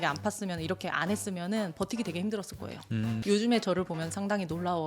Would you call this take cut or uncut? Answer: cut